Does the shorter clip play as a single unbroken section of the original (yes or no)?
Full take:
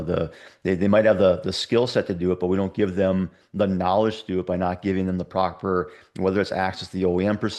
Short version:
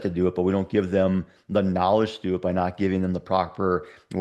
yes